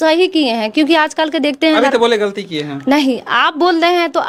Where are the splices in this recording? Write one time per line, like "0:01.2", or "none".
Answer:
none